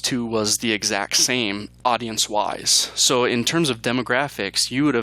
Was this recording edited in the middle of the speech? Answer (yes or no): yes